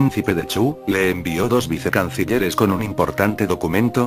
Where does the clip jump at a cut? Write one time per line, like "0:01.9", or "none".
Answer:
none